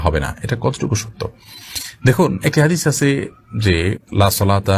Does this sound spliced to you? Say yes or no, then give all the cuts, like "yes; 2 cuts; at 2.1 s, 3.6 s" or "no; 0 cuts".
no; 0 cuts